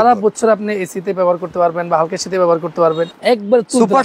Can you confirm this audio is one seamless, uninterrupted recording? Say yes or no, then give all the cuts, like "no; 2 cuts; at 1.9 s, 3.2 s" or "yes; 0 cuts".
no; 1 cut; at 3.1 s